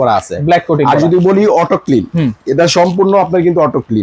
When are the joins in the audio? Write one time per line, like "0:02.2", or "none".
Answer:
none